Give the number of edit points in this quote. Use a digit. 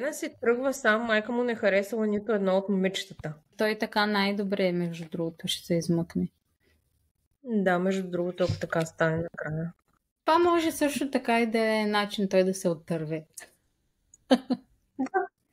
2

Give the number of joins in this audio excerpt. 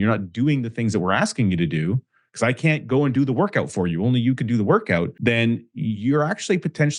1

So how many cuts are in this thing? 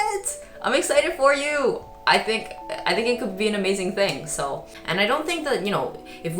1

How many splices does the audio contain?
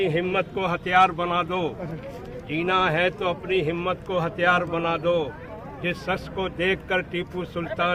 0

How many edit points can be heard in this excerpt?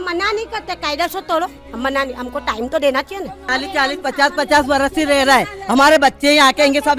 1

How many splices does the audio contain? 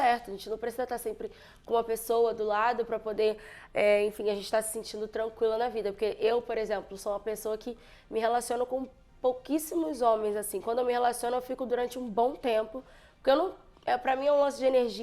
0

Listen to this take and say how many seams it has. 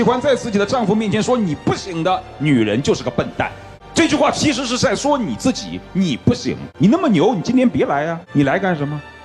2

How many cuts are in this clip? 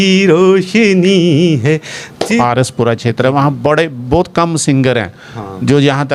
1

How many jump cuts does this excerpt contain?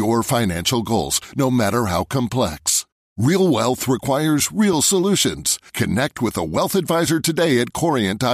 0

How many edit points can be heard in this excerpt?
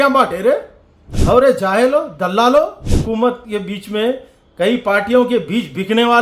1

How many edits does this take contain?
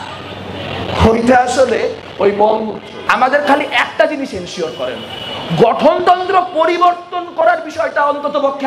1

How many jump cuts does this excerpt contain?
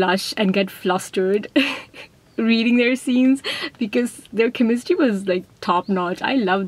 0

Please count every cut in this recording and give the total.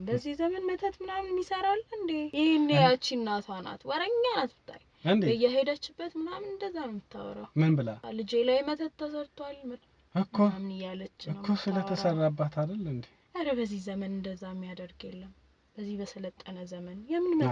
2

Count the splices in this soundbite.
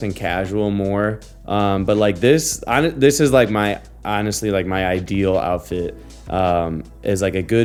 0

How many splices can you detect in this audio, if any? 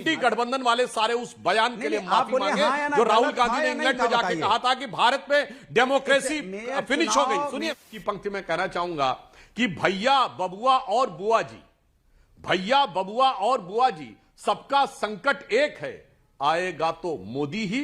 1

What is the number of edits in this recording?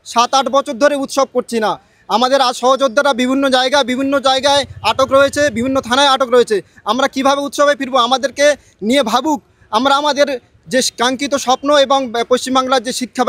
0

